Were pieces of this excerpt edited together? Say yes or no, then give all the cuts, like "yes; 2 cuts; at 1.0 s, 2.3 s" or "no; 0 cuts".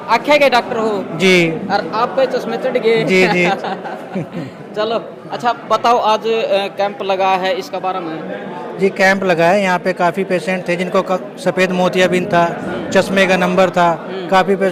no; 0 cuts